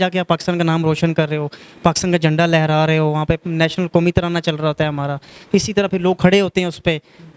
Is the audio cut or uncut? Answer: uncut